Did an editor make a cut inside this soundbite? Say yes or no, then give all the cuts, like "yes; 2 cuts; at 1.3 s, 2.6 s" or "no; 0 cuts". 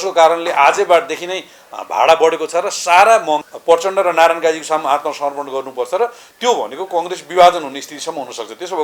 yes; 1 cut; at 3.5 s